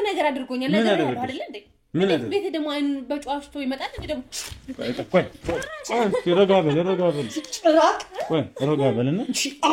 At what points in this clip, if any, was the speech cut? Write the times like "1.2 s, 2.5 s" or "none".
none